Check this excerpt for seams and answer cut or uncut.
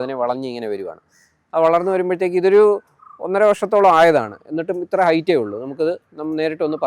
uncut